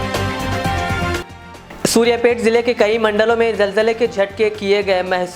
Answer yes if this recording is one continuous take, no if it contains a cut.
no